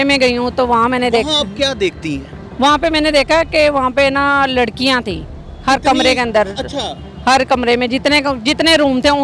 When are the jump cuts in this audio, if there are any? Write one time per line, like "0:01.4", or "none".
none